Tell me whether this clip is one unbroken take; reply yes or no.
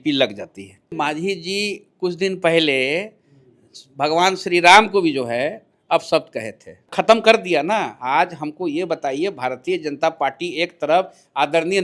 no